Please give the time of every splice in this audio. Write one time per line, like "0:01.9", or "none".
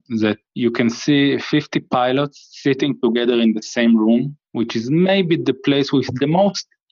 none